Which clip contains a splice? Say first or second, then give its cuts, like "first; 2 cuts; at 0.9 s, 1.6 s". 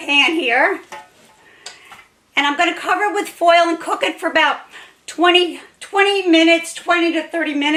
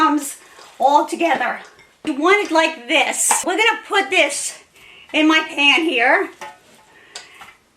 second; 2 cuts; at 2.0 s, 3.4 s